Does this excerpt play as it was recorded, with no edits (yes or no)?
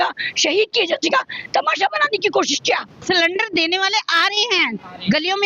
no